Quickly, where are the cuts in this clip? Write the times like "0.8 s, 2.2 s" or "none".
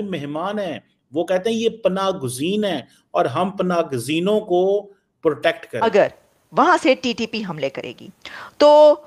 5.7 s

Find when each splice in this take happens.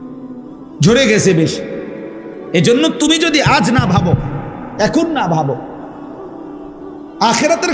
0.9 s

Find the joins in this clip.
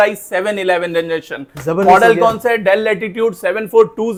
none

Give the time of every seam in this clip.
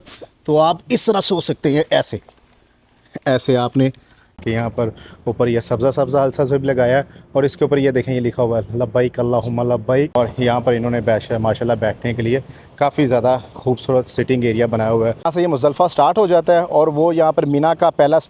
4.3 s, 10.2 s, 15.3 s

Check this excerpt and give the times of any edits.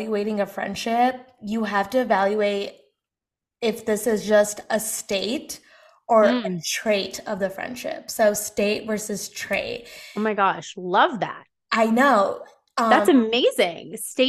none

